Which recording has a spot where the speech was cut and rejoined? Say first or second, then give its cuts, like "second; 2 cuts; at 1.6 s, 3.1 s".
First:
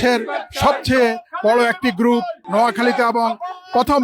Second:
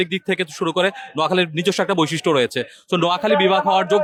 first; 1 cut; at 2.4 s